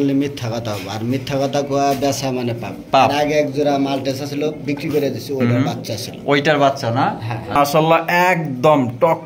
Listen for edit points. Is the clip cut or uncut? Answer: cut